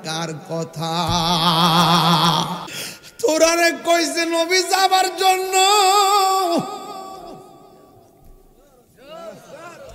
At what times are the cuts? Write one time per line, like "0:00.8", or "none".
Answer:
0:02.6